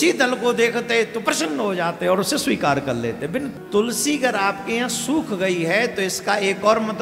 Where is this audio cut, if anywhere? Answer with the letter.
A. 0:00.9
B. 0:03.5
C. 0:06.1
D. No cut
B